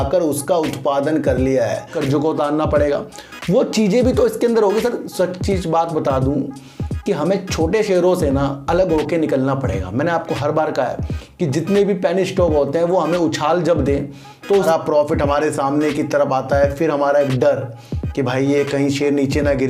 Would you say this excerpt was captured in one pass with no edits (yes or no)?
no